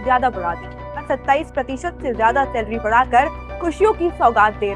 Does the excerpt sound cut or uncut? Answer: cut